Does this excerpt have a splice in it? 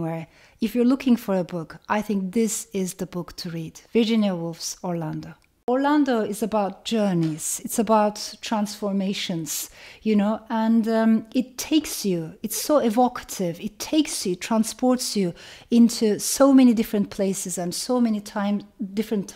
yes; 1 cut; at 5.6 s

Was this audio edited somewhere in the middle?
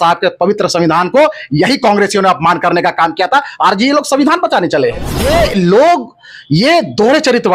yes; 1 cut; at 5.1 s

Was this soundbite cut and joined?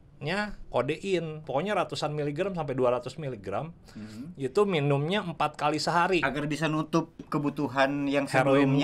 yes; 1 cut; at 1.4 s

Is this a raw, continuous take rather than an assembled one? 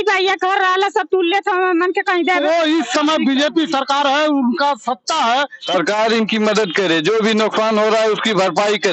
no; 2 cuts; at 2.4 s, 5.6 s

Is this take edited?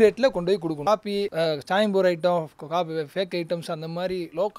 yes; 1 cut; at 0.9 s

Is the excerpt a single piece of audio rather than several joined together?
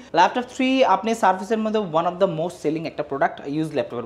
yes; 0 cuts

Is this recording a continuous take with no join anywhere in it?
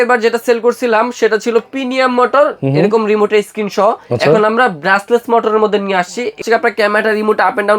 no; 1 cut; at 6.4 s

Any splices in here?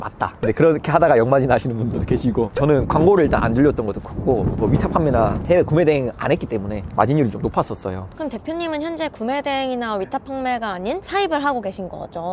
no; 0 cuts

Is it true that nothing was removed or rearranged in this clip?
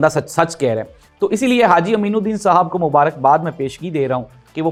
yes; 0 cuts

